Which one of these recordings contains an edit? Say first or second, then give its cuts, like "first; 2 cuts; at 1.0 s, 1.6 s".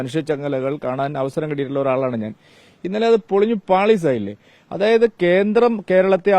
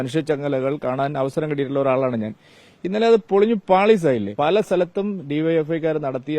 second; 1 cut; at 4.3 s